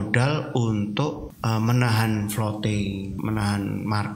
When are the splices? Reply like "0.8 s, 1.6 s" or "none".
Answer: 1.3 s, 3.2 s